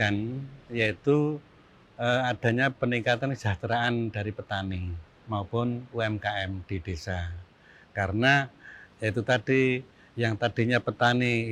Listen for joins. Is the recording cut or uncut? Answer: uncut